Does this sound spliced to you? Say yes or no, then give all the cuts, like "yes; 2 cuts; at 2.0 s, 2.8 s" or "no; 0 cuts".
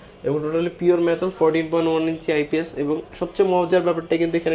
no; 0 cuts